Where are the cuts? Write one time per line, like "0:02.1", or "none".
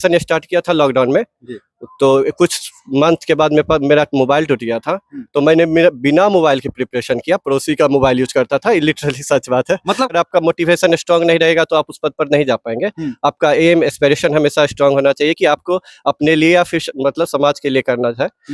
0:10.1